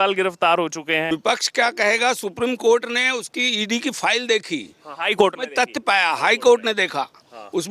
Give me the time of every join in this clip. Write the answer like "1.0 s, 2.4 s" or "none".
1.1 s